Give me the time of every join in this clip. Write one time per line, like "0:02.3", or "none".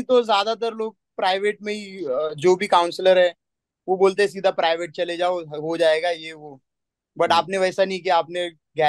none